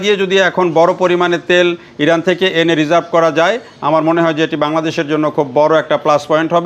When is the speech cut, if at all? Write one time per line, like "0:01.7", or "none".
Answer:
none